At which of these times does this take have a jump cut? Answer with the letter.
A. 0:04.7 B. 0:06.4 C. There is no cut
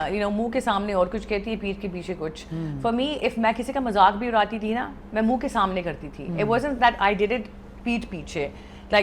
C